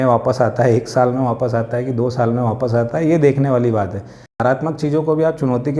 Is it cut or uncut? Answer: cut